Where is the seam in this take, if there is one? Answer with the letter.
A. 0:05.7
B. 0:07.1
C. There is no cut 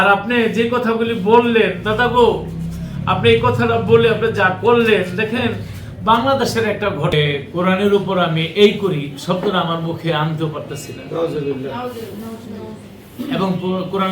B